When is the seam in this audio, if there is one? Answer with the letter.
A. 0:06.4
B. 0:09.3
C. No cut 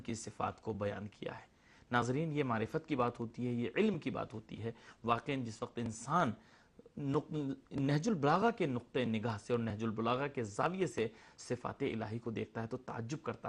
B